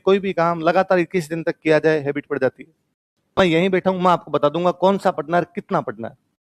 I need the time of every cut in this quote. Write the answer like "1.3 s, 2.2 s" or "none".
3.3 s